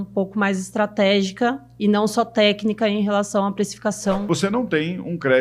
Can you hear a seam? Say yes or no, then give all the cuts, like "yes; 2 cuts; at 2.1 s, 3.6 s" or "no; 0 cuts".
yes; 1 cut; at 4.2 s